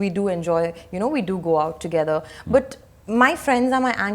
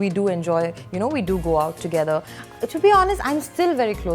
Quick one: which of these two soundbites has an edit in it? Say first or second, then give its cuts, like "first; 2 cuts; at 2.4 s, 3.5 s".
second; 1 cut; at 2.3 s